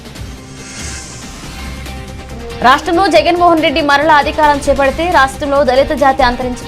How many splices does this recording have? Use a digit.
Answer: 1